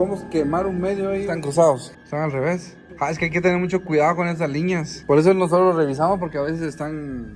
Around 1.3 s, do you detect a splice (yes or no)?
yes